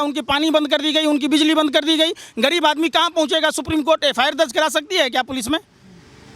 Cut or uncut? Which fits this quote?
uncut